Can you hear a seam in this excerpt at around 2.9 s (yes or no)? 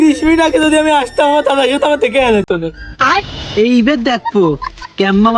yes